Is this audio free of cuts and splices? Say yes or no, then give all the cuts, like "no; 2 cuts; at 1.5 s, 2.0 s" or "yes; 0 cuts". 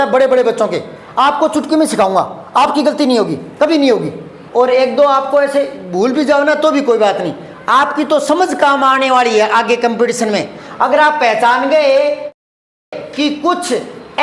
no; 1 cut; at 4.4 s